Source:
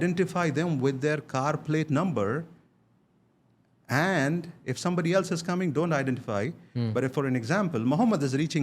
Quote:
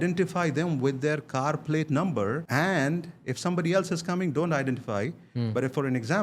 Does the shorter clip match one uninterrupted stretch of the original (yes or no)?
no